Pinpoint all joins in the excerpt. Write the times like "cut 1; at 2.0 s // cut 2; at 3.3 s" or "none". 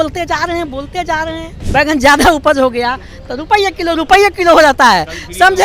cut 1; at 1.5 s